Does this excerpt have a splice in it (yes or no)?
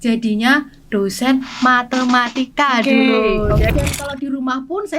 yes